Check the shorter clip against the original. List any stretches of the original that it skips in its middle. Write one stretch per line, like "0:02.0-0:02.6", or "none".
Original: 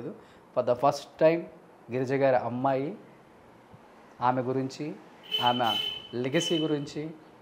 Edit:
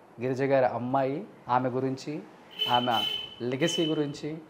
0:03.0-0:04.1